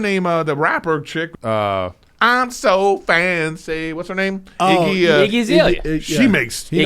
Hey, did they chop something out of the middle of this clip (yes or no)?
yes